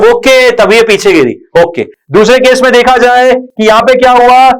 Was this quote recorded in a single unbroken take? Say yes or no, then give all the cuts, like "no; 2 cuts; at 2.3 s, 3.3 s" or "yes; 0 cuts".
yes; 0 cuts